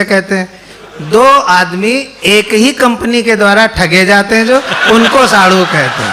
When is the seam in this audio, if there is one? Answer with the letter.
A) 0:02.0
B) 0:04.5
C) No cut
C